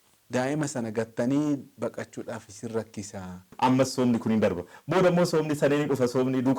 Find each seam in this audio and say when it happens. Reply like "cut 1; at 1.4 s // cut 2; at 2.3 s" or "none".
cut 1; at 3.5 s